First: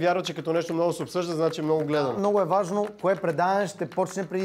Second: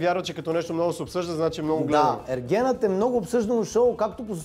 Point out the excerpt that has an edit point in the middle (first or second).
first